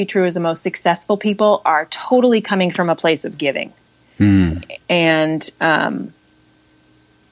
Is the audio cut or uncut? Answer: uncut